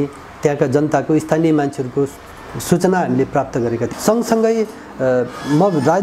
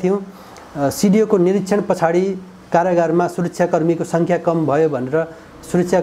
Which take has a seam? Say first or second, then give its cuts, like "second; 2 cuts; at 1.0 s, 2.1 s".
first; 1 cut; at 3.9 s